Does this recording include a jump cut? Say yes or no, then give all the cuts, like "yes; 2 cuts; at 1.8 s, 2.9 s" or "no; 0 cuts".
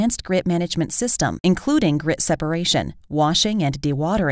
no; 0 cuts